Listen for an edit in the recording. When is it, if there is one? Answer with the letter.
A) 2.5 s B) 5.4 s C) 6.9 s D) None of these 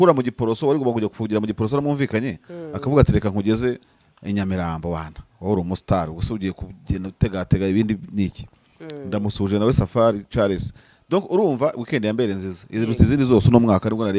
D